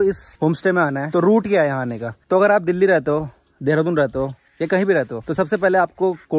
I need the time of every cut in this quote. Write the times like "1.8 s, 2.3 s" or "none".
none